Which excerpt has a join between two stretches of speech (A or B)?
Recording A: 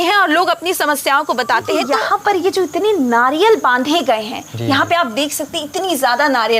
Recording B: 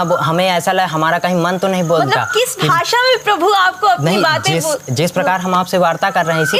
A